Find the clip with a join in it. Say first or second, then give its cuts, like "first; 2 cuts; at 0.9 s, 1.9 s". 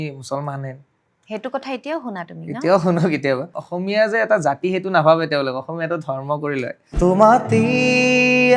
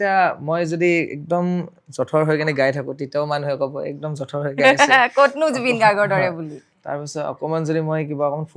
first; 2 cuts; at 3.6 s, 6.9 s